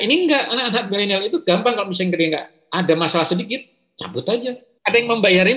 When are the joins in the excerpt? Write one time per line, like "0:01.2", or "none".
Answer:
0:04.7